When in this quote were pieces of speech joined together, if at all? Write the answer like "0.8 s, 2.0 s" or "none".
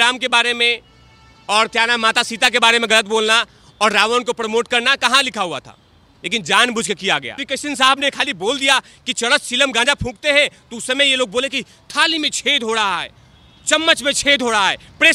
7.5 s